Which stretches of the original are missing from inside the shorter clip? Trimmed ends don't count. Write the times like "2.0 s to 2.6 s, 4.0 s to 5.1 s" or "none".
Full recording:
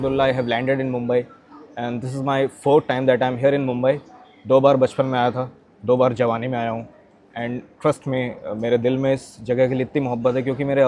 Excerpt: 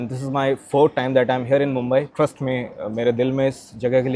4.0 s to 7.8 s